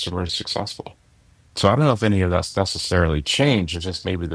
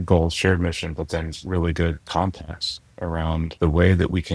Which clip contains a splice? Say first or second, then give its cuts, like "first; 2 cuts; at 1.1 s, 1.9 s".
second; 2 cuts; at 2.0 s, 3.5 s